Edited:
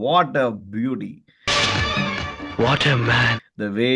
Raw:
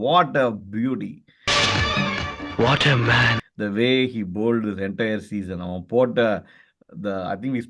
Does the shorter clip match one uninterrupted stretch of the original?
yes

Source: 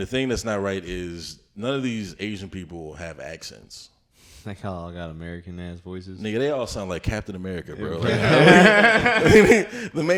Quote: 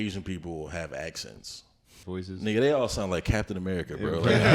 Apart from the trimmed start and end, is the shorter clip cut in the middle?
yes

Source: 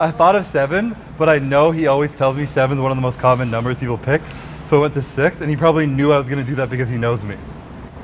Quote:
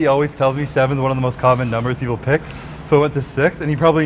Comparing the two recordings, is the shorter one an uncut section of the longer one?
yes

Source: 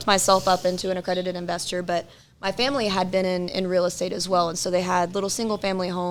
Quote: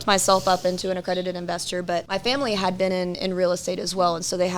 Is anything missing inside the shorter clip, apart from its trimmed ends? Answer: yes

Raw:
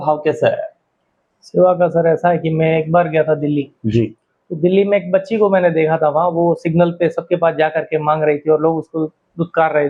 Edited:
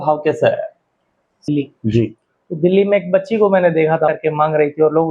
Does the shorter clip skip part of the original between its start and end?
yes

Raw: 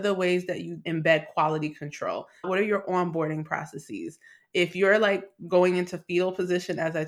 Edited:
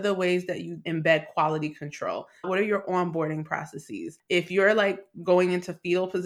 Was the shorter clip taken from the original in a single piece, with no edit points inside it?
no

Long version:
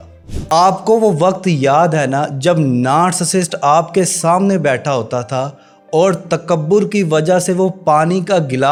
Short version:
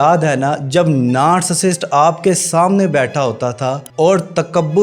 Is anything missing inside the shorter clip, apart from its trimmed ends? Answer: yes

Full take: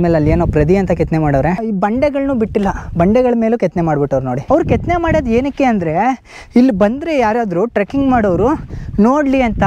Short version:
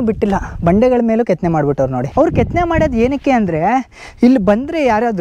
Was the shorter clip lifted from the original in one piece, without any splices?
yes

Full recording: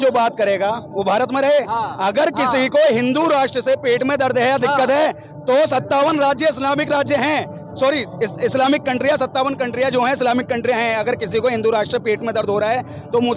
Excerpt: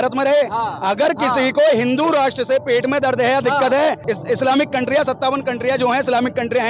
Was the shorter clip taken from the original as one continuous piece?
no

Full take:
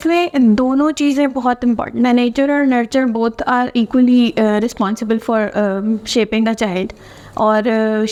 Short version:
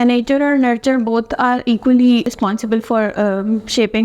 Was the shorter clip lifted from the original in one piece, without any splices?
no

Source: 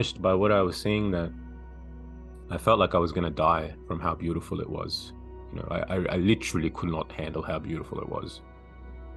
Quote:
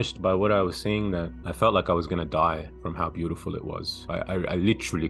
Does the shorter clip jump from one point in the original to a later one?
yes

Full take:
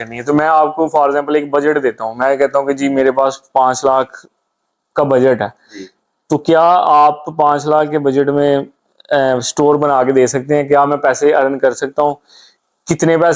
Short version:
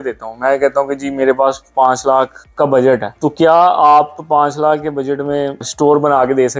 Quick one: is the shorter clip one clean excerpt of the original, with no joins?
no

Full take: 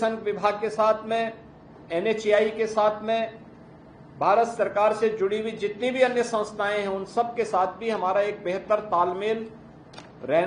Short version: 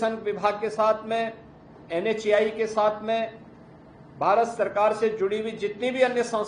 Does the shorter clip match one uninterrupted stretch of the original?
yes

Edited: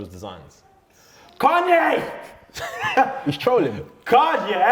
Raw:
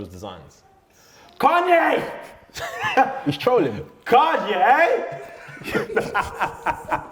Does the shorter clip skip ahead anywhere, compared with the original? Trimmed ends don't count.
no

